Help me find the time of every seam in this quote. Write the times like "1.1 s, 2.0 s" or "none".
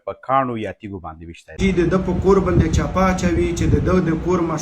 1.6 s